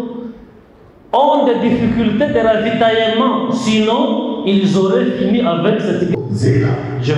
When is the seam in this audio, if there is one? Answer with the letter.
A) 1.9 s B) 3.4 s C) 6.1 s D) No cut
C